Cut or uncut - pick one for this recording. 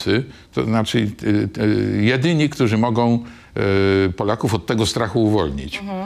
uncut